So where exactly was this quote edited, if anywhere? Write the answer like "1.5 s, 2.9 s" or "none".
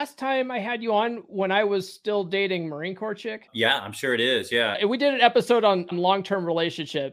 3.5 s, 4.8 s, 5.9 s